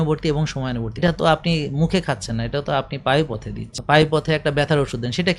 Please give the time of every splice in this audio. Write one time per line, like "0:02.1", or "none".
0:00.9
0:03.7